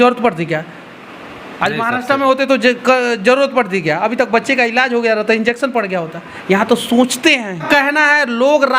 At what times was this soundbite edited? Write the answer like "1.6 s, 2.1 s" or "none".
7.6 s